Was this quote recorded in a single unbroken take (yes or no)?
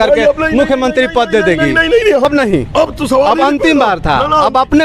no